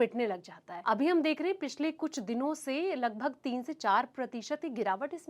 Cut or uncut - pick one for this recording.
uncut